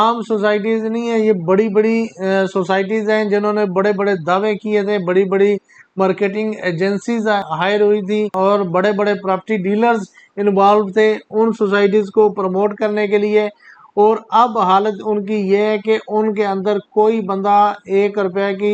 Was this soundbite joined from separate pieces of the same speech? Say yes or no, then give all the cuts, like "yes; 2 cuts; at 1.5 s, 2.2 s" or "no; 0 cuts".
no; 0 cuts